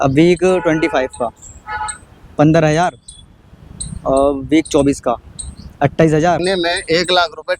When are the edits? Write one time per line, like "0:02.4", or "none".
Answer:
0:06.4